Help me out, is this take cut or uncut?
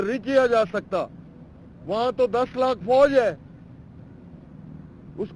uncut